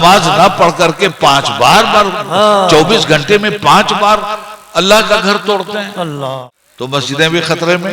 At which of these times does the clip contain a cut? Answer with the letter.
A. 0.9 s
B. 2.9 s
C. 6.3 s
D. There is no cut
C